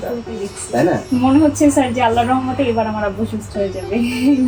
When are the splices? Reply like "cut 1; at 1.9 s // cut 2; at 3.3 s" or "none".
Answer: cut 1; at 1.0 s